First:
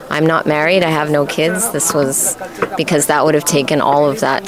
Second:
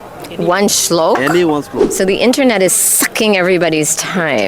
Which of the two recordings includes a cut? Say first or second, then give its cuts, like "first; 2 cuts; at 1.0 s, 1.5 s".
second; 1 cut; at 1.8 s